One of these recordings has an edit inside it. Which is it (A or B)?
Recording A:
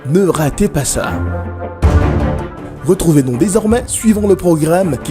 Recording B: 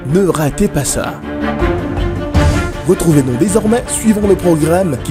A